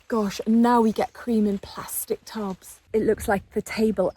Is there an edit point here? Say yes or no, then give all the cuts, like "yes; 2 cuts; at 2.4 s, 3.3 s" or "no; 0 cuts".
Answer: yes; 1 cut; at 2.8 s